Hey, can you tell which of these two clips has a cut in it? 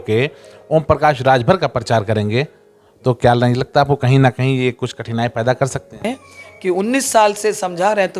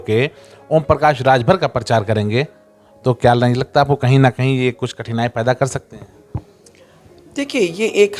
first; 1 cut; at 6.0 s

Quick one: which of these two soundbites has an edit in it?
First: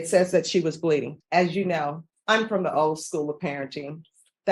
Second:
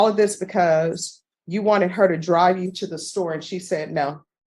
first; 2 cuts; at 1.1 s, 2.1 s

